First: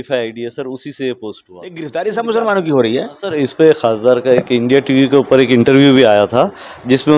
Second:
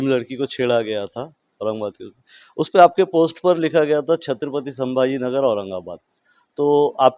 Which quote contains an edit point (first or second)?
first